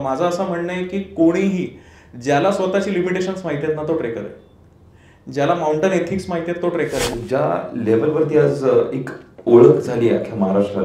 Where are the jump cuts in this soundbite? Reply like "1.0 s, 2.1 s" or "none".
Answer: 7.1 s